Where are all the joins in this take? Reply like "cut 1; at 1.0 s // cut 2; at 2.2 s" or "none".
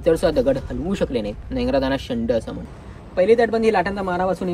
cut 1; at 2.5 s